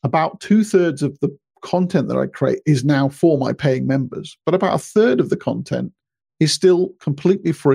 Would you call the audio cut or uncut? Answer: uncut